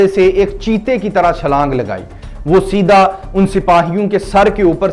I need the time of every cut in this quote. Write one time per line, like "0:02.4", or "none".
none